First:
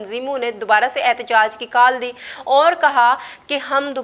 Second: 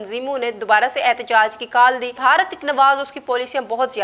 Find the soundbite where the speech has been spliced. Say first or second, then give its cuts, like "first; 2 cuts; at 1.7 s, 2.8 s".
second; 1 cut; at 2.1 s